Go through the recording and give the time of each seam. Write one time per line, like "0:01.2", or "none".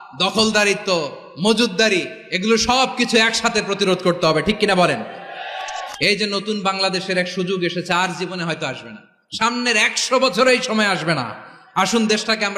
0:05.8